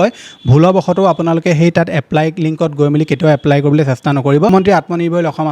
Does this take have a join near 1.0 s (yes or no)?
no